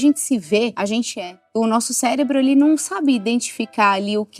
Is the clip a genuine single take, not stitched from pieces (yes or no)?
no